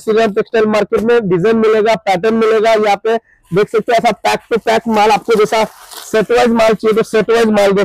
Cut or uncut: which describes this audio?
uncut